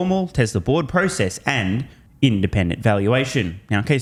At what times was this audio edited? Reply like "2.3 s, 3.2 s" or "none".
none